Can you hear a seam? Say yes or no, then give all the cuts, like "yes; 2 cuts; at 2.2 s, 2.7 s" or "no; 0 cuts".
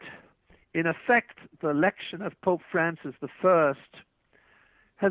no; 0 cuts